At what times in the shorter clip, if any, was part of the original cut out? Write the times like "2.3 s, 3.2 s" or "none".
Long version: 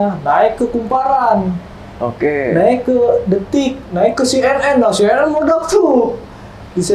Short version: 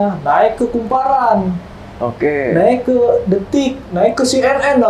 none